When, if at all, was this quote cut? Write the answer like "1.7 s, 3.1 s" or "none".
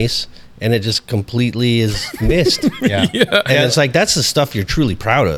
none